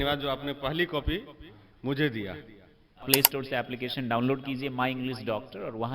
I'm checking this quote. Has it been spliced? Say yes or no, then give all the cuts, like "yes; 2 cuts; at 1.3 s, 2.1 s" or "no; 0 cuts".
yes; 1 cut; at 3.0 s